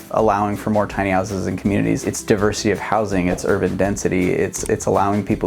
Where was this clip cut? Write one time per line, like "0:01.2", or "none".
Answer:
0:02.1